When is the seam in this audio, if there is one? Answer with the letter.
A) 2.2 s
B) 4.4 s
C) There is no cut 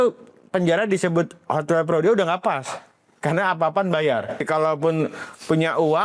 B